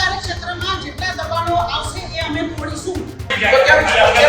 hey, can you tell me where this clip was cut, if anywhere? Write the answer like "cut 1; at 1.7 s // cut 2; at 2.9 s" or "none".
cut 1; at 3.3 s